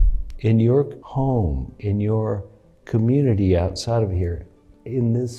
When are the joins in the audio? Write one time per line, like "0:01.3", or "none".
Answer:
0:01.0